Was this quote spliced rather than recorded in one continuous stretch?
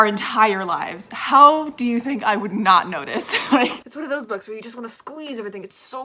yes; 1 cut; at 3.8 s

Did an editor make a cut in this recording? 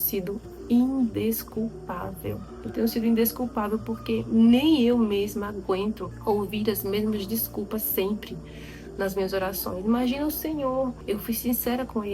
yes; 3 cuts; at 2.5 s, 6.1 s, 11.0 s

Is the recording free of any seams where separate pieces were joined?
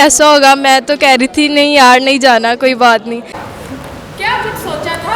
no; 1 cut; at 3.2 s

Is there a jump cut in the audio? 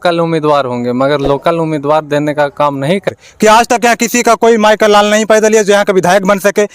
yes; 1 cut; at 3.1 s

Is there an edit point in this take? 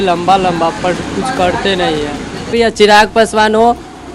yes; 1 cut; at 2.5 s

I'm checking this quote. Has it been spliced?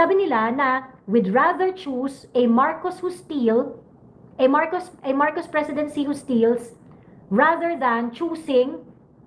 no; 0 cuts

